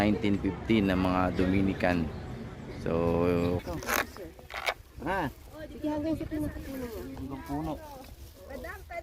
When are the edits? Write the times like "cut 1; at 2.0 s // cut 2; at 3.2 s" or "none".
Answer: cut 1; at 3.6 s